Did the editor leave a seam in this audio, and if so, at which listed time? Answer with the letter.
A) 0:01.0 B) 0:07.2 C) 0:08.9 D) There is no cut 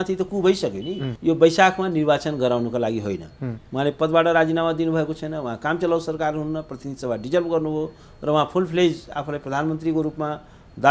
A